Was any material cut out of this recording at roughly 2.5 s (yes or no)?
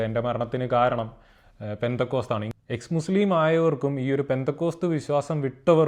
yes